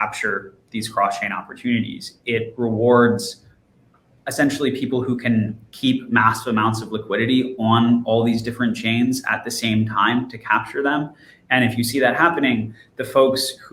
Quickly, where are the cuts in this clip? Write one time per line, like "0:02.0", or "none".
none